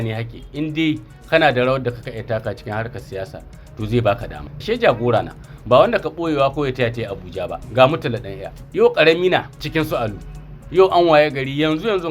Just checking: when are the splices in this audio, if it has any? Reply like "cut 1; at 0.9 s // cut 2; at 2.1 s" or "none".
cut 1; at 4.5 s // cut 2; at 7.5 s